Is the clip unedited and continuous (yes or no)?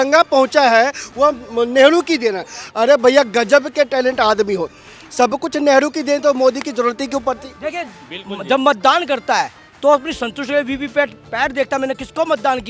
no